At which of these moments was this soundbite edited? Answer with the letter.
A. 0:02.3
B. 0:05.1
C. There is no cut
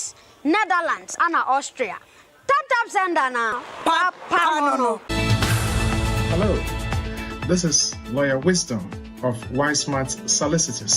B